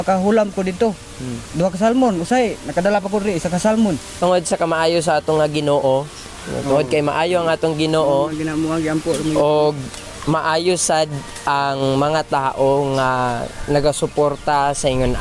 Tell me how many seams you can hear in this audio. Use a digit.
1